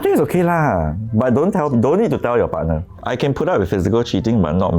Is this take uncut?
no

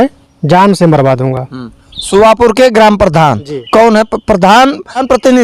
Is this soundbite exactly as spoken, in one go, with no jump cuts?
yes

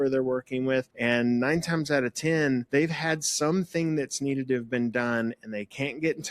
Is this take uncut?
no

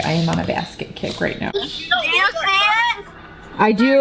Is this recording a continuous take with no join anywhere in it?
no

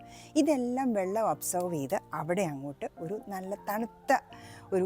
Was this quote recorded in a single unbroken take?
yes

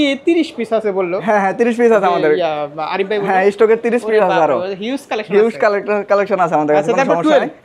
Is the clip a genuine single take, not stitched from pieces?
yes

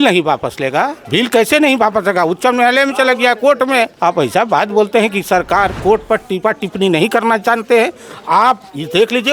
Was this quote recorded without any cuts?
no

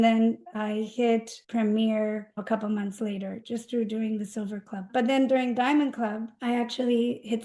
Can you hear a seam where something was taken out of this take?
yes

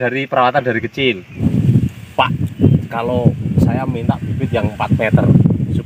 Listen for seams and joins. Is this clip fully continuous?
no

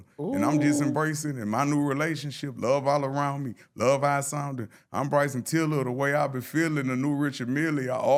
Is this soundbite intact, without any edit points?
yes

